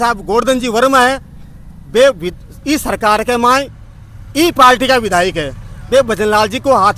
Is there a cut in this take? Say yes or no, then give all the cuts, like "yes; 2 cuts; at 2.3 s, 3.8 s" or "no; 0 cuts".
no; 0 cuts